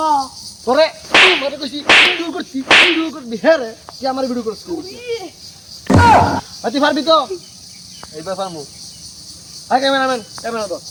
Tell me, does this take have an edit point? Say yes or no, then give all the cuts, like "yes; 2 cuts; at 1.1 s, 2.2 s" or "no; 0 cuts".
no; 0 cuts